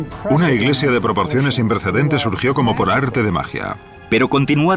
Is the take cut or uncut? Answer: uncut